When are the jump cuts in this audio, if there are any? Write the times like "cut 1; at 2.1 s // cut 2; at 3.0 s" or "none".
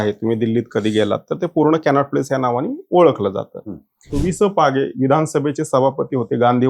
cut 1; at 4.1 s